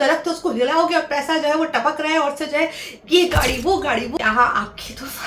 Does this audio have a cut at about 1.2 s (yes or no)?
no